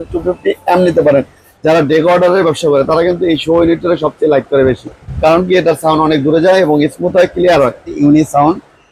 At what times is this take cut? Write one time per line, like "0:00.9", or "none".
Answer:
0:01.4
0:08.0